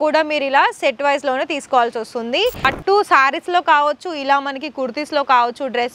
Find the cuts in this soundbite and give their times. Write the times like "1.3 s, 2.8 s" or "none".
2.7 s